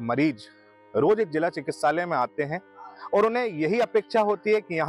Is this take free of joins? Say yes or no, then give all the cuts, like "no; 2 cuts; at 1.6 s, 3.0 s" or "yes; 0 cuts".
yes; 0 cuts